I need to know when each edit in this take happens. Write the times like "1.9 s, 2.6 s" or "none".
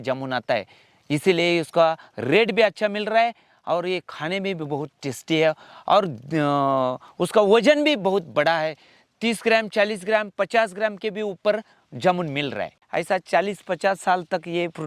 12.8 s